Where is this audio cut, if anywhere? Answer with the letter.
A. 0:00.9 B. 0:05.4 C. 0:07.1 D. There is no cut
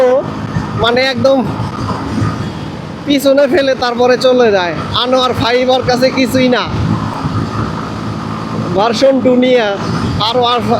D